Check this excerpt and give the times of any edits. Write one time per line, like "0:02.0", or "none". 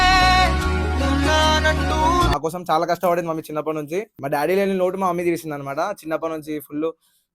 0:02.3